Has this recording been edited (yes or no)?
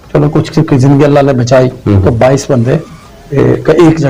no